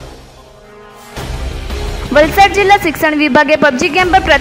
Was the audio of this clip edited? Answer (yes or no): no